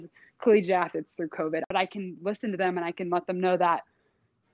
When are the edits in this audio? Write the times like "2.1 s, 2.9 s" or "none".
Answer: 1.6 s